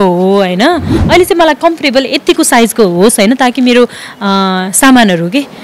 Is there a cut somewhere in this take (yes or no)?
yes